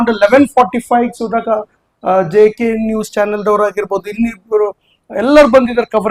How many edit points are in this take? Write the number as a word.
zero